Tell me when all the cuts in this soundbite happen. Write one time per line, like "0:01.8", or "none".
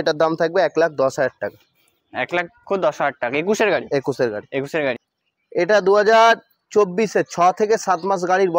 0:05.1